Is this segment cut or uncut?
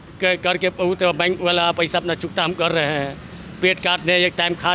uncut